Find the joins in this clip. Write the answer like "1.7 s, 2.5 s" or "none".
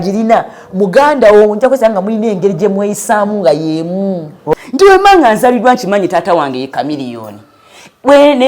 4.5 s